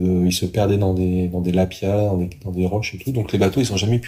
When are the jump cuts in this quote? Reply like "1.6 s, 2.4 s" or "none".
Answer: none